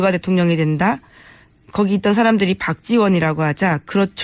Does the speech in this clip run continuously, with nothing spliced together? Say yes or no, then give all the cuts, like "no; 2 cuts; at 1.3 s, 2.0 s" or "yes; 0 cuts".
yes; 0 cuts